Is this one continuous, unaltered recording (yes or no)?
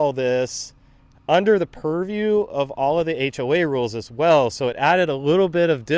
yes